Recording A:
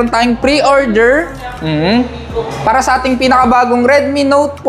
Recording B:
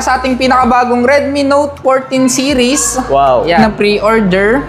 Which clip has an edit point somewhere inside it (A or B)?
B